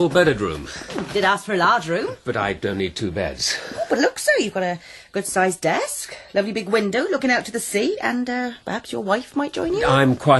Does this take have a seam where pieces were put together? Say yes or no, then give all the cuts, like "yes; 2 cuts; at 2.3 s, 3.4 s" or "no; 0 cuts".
yes; 1 cut; at 5.1 s